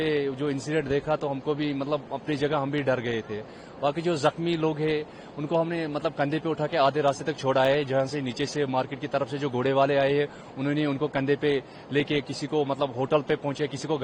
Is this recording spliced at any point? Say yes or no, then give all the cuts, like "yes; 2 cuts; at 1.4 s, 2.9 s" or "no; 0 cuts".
no; 0 cuts